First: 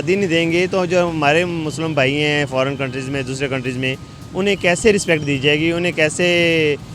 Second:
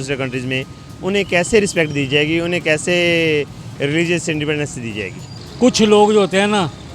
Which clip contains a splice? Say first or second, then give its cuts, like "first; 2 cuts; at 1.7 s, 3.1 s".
second; 1 cut; at 5.3 s